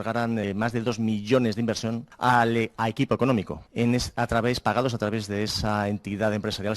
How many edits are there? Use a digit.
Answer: 2